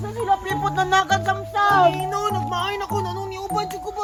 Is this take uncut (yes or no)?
yes